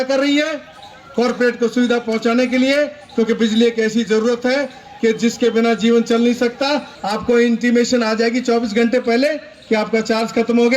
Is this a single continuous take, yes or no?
no